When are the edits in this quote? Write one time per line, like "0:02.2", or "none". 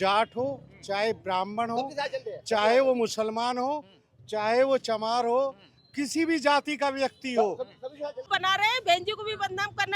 0:08.2